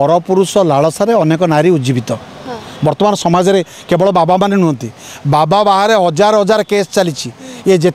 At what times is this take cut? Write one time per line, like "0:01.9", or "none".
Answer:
none